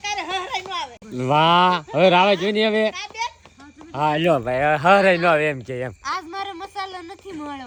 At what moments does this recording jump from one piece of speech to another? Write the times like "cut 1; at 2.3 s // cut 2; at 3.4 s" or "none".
none